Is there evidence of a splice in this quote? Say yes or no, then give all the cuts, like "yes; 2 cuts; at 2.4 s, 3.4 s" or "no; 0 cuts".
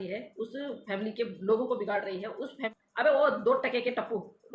yes; 1 cut; at 2.7 s